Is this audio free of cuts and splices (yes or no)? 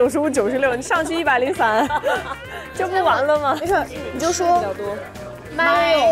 no